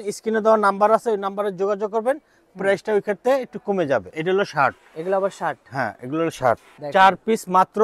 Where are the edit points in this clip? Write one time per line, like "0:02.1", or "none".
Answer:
0:04.1
0:06.7